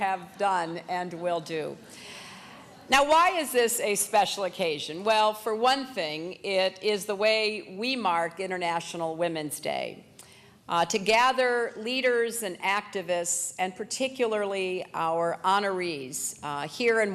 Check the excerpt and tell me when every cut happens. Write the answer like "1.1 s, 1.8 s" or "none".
2.0 s